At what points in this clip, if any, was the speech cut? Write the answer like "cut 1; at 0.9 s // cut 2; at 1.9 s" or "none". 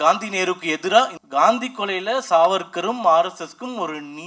cut 1; at 1.2 s